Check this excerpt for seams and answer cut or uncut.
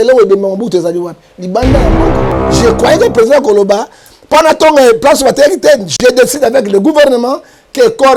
uncut